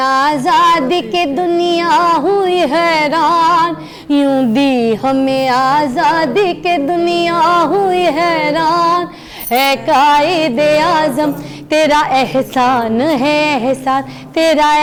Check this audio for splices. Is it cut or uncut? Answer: uncut